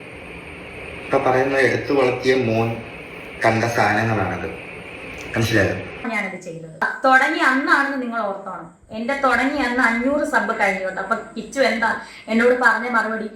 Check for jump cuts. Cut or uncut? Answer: cut